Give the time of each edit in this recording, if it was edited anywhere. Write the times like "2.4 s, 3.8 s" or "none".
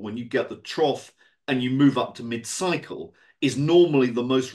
none

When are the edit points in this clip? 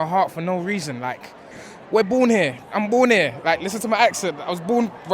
1.6 s

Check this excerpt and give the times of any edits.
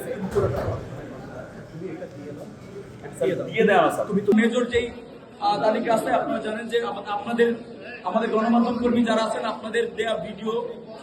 4.3 s

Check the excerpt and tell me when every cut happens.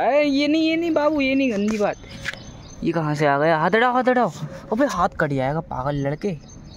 none

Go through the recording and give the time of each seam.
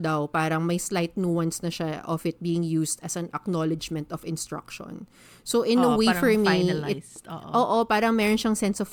none

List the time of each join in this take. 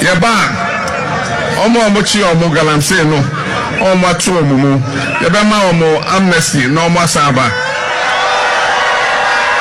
none

